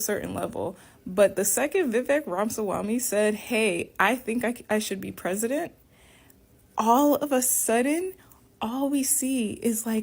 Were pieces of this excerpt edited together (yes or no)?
no